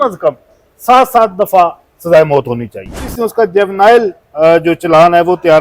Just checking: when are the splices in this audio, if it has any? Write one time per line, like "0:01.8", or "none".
0:03.0